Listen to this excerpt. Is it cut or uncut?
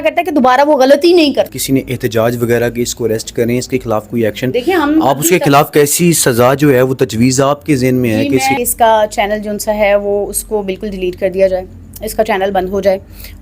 cut